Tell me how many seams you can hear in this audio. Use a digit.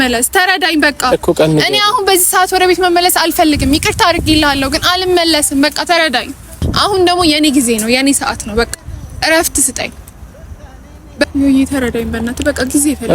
2